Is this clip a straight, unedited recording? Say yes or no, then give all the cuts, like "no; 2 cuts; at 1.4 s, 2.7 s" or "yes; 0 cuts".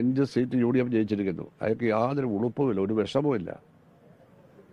yes; 0 cuts